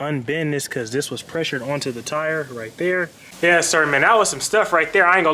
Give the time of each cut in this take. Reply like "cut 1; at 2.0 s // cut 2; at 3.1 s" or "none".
cut 1; at 3.2 s